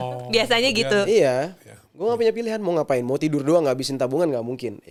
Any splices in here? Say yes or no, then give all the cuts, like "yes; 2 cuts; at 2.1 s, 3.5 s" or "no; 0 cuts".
no; 0 cuts